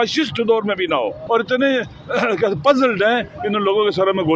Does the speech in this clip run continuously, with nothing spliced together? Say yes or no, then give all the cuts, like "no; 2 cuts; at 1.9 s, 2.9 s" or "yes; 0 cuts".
no; 1 cut; at 1.2 s